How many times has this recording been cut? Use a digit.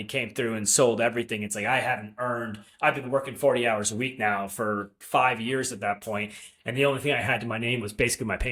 0